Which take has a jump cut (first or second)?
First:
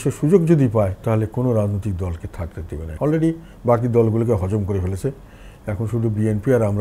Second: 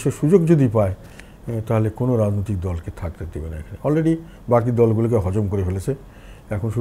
first